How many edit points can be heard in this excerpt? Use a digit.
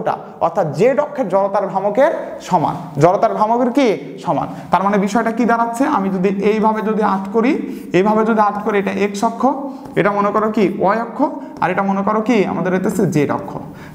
0